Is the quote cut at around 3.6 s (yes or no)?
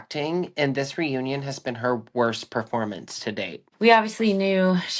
yes